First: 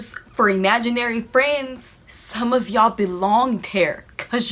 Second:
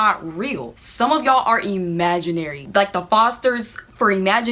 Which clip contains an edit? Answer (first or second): second